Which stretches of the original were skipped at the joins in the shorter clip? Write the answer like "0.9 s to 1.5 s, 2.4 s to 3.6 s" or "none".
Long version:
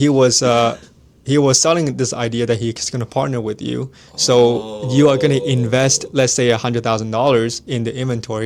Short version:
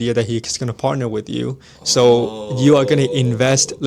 none